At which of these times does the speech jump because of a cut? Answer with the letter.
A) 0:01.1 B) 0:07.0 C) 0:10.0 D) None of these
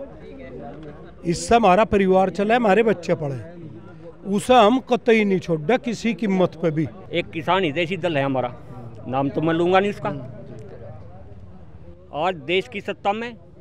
B